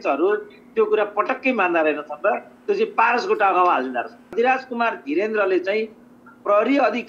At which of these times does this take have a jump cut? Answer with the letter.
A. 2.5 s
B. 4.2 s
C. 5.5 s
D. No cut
B